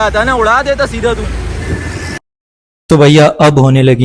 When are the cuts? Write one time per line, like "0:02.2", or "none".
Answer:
0:02.2